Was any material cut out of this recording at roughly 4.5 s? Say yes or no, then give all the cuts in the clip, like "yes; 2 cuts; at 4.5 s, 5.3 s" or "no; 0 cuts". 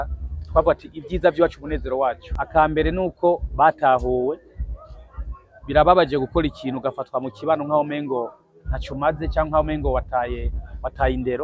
no; 1 cut; at 2.3 s